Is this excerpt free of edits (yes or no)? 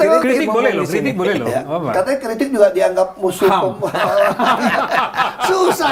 yes